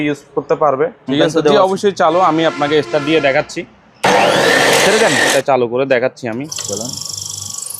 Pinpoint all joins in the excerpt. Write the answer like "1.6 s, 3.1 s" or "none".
1.1 s, 5.3 s